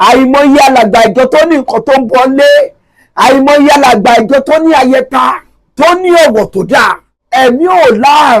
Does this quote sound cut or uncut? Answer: cut